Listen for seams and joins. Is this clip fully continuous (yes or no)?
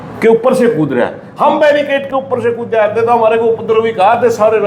yes